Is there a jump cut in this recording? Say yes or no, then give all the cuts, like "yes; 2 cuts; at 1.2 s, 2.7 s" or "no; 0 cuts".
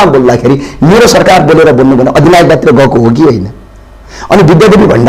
no; 0 cuts